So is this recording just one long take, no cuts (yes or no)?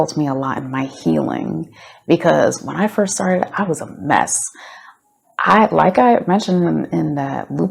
yes